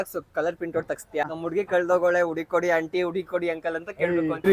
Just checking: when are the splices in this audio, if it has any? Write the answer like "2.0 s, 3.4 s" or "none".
1.2 s